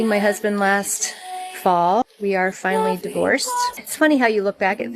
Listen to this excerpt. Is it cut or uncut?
cut